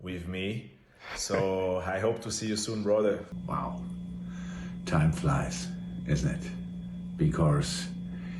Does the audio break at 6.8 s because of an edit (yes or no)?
yes